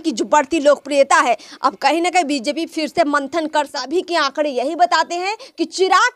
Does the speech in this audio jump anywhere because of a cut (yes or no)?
yes